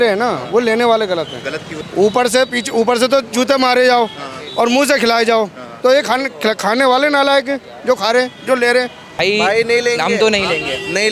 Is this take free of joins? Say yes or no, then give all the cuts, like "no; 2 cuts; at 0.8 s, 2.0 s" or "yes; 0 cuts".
no; 2 cuts; at 1.7 s, 9.1 s